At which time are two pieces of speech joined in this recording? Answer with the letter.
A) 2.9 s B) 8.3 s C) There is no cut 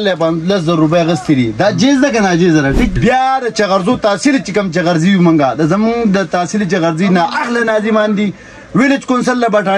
A